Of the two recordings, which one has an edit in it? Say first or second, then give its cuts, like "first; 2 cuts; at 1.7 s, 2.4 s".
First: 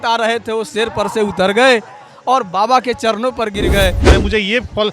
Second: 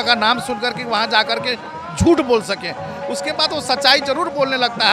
first; 1 cut; at 4.0 s